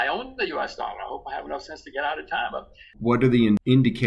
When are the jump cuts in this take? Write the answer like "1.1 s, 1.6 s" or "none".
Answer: 3.0 s